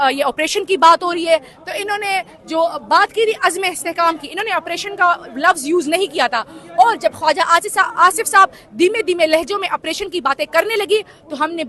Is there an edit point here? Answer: no; 0 cuts

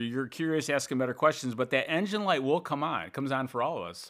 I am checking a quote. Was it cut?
no; 0 cuts

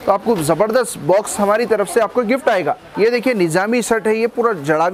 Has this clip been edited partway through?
yes; 1 cut; at 2.8 s

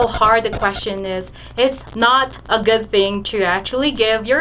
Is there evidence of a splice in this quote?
yes; 1 cut; at 1.8 s

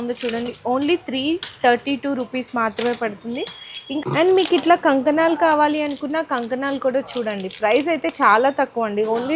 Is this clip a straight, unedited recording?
yes; 0 cuts

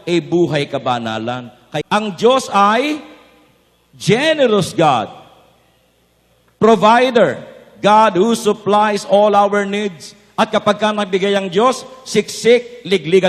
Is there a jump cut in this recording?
yes; 1 cut; at 1.6 s

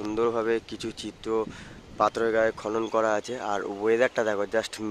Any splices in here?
no; 0 cuts

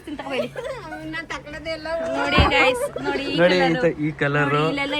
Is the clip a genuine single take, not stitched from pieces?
yes; 0 cuts

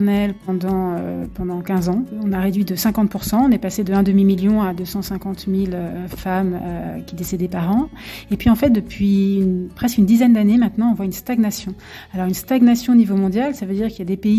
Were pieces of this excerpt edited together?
yes; 2 cuts; at 2.1 s, 7.9 s

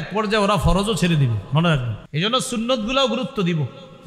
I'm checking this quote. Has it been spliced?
yes; 1 cut; at 2.0 s

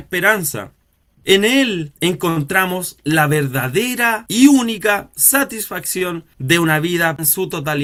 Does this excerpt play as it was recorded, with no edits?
yes; 0 cuts

